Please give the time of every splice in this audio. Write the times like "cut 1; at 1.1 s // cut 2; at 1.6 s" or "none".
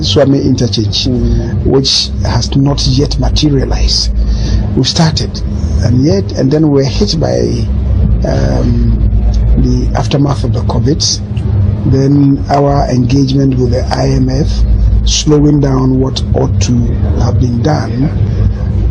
none